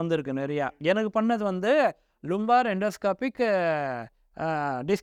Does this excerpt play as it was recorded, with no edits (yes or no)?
yes